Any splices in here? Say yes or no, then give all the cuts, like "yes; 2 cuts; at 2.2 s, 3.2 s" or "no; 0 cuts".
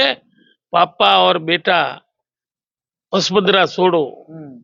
no; 0 cuts